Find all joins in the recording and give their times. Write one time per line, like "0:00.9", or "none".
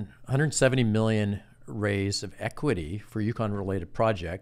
none